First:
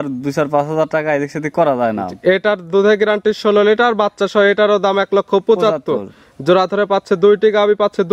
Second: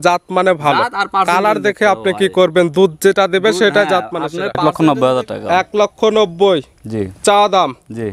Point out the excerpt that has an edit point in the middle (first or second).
second